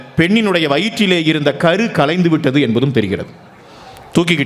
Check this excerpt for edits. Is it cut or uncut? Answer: uncut